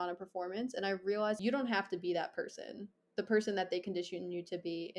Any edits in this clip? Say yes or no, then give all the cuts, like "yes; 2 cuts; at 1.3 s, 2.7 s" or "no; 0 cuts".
yes; 1 cut; at 1.4 s